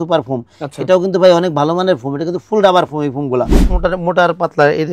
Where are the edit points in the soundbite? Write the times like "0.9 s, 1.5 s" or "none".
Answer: 3.6 s